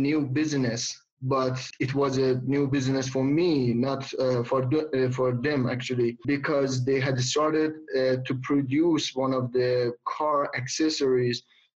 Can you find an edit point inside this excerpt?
no; 0 cuts

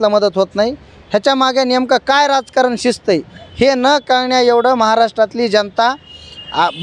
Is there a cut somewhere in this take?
no; 0 cuts

